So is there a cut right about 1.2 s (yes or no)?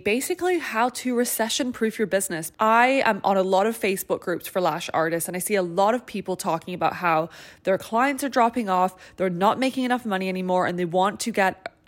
no